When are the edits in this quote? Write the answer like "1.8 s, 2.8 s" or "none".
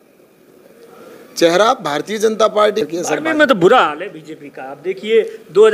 2.9 s